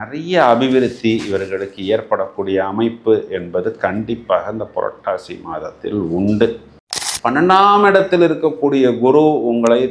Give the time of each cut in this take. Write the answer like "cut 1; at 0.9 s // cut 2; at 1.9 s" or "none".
cut 1; at 6.8 s